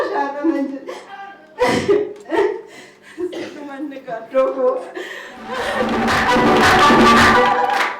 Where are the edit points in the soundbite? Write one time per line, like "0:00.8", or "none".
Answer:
0:05.9